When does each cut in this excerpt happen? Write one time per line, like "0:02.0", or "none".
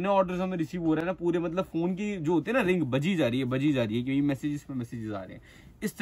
none